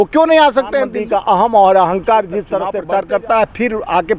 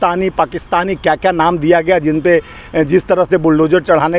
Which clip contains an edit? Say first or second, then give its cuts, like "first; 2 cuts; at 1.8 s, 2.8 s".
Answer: first; 2 cuts; at 0.9 s, 2.8 s